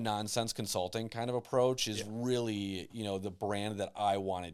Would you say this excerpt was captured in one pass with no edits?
yes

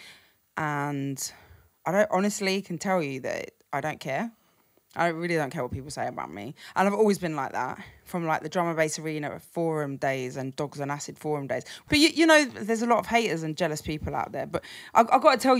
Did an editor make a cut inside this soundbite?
yes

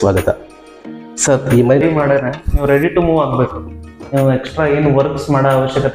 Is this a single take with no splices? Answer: no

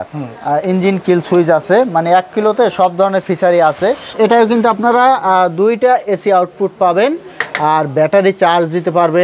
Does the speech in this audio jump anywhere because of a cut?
yes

